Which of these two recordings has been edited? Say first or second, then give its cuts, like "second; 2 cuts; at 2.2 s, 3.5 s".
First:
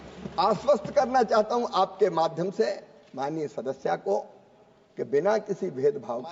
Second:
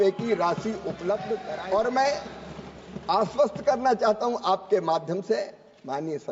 second; 1 cut; at 1.5 s